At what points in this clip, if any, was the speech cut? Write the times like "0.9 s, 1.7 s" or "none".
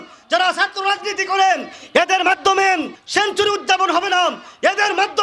2.9 s